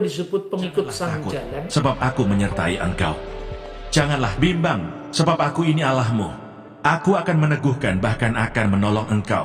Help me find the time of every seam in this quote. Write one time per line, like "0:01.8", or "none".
0:01.7